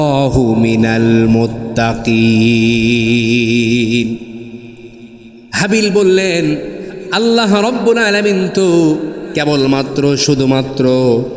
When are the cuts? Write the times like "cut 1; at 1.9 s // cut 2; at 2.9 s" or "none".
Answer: none